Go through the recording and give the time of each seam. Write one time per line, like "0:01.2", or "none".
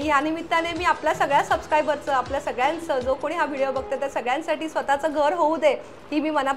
none